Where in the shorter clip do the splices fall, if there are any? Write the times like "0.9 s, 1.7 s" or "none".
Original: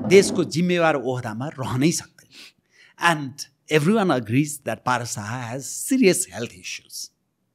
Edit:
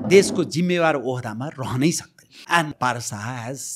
2.7 s